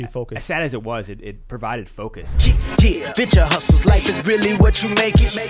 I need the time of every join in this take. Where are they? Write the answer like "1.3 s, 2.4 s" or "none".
2.3 s